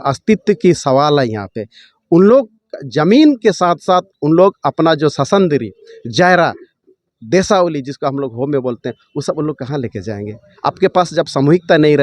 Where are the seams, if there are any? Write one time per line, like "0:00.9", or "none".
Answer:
none